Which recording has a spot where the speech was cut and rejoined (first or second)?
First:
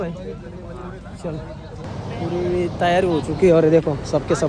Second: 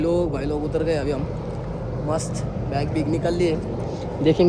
first